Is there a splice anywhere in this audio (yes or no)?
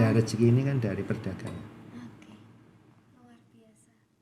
no